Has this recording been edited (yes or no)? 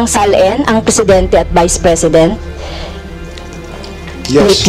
no